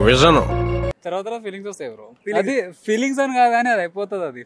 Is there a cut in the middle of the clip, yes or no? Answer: yes